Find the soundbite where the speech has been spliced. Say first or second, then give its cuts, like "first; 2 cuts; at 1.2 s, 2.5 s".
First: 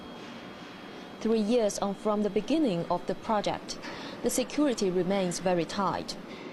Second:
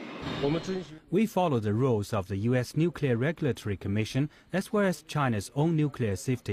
second; 1 cut; at 2.5 s